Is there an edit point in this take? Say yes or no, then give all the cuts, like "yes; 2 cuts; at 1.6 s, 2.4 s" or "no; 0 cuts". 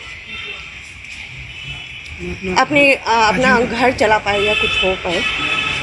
no; 0 cuts